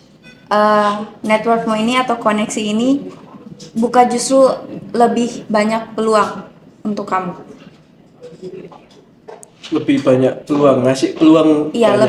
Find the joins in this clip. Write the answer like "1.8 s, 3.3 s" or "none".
none